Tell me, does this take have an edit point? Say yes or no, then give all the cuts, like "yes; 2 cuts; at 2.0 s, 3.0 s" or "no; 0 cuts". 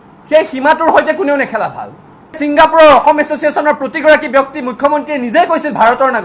yes; 1 cut; at 2.4 s